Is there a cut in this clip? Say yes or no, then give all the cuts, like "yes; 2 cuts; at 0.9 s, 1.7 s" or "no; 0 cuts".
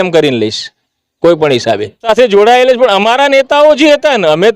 yes; 1 cut; at 2.1 s